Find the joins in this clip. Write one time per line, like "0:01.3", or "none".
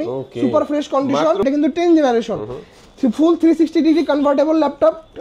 0:01.4